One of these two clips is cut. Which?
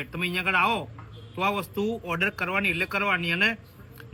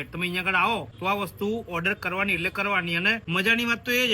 second; 2 cuts; at 0.9 s, 3.2 s

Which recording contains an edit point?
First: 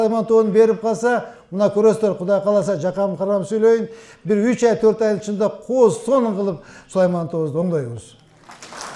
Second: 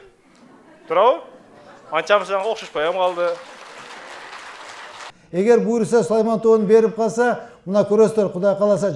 second; 1 cut; at 5.1 s

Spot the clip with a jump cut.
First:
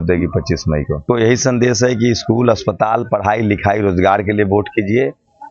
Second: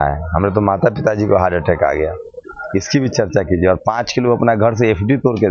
first; 1 cut; at 1.0 s

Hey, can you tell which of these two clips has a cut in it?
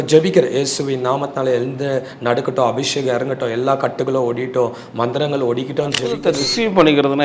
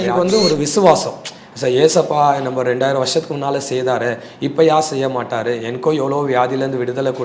first; 1 cut; at 6.2 s

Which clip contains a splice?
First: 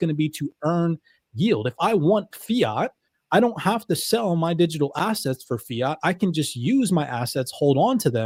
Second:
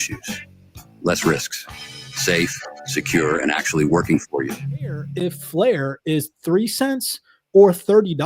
second; 1 cut; at 5.0 s

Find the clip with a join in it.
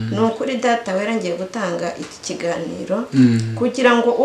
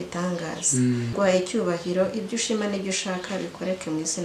second; 1 cut; at 1.1 s

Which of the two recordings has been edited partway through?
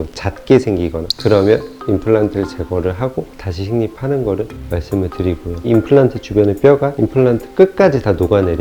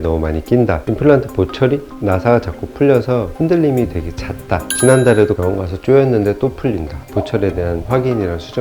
second; 2 cuts; at 0.8 s, 7.0 s

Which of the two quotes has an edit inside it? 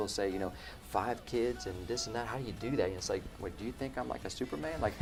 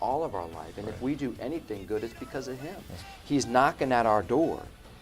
second; 1 cut; at 3.0 s

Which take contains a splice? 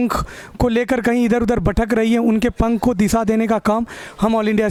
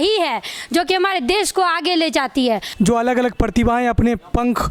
second; 1 cut; at 2.7 s

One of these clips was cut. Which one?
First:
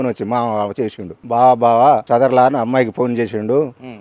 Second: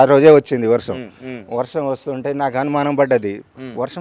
first; 2 cuts; at 1.1 s, 2.0 s

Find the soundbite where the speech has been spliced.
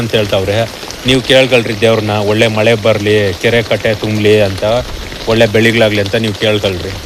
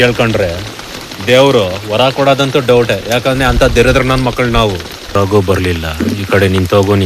second; 1 cut; at 5.1 s

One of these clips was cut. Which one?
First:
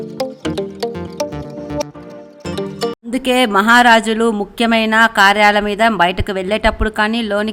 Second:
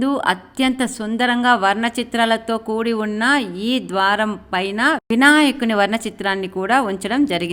first; 1 cut; at 3.1 s

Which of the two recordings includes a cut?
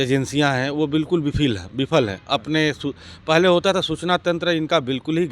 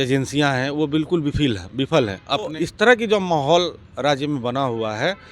second; 1 cut; at 2.5 s

